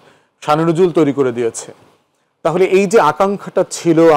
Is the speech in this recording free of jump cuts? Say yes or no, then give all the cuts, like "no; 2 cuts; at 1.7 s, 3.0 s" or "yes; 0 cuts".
yes; 0 cuts